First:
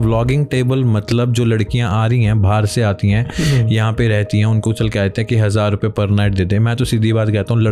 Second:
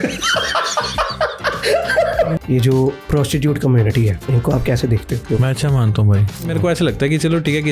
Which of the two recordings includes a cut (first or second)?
second